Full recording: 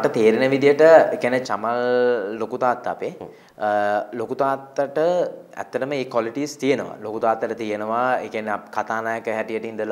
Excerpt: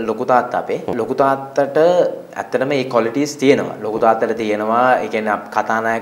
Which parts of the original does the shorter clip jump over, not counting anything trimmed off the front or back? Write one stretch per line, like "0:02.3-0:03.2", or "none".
0:03.2-0:04.1